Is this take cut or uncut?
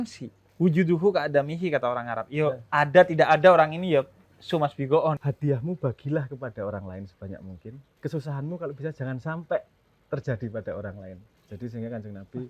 cut